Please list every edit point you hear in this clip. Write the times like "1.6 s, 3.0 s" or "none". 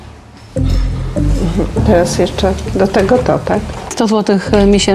3.9 s

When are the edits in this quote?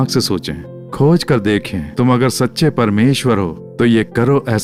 none

